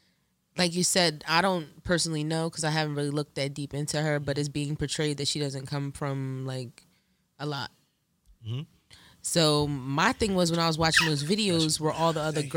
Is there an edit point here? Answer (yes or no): no